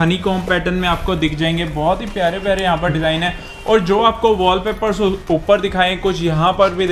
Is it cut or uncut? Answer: uncut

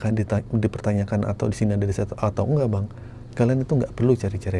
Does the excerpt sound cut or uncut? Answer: uncut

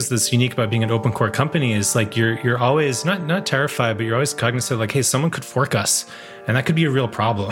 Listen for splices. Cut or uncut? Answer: uncut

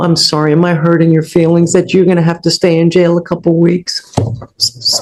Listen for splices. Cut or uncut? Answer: uncut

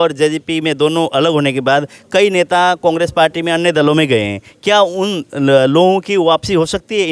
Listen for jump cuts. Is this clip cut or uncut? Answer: uncut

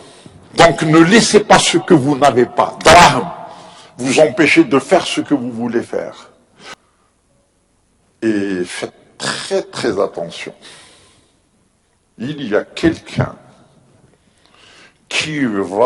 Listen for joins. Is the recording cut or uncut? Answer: cut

